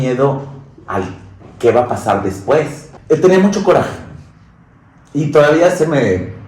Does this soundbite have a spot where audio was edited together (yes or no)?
yes